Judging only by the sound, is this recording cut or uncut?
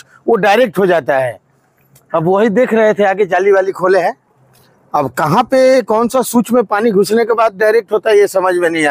uncut